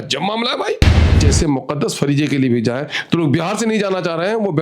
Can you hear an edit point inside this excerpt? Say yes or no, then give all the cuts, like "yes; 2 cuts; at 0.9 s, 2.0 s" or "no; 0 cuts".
yes; 1 cut; at 1.1 s